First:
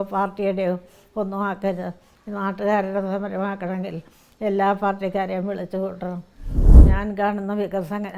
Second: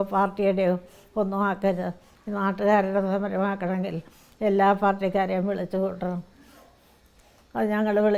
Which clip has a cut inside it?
first; 1 cut; at 6.8 s

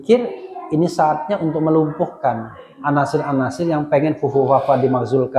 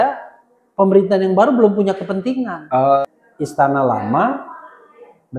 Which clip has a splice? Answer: second; 1 cut; at 3.0 s

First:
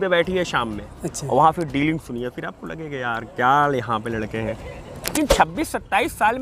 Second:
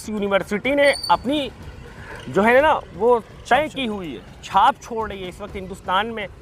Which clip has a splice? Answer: first; 1 cut; at 5.1 s

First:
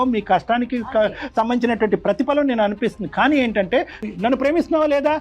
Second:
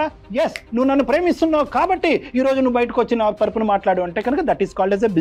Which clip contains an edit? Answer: first; 1 cut; at 4.1 s

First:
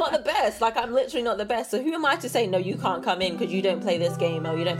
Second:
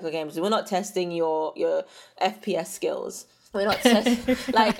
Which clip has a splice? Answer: second; 1 cut; at 2.1 s

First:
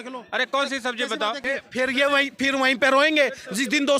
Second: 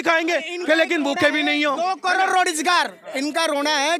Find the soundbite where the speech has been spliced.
first; 1 cut; at 1.4 s

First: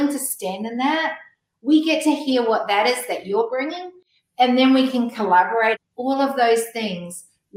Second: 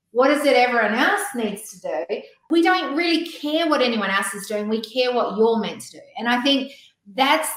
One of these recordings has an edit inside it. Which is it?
first; 1 cut; at 5.8 s

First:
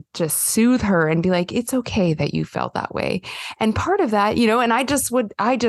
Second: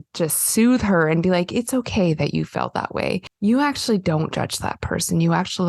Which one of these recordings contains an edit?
second; 1 cut; at 3.3 s

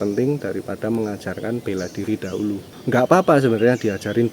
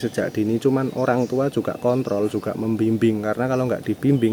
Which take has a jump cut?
first; 1 cut; at 2.7 s

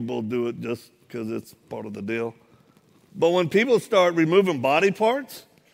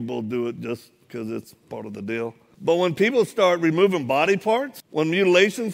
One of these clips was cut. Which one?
second; 2 cuts; at 2.5 s, 4.8 s

